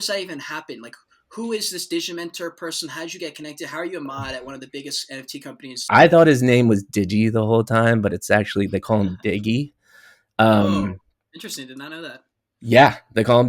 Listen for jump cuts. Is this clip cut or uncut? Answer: cut